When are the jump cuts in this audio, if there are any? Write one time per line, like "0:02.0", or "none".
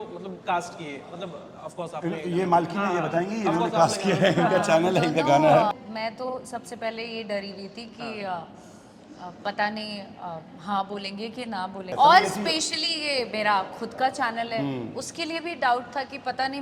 0:05.7
0:11.9